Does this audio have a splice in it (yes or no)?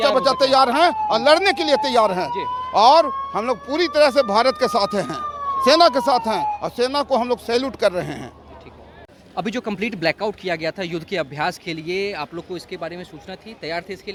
no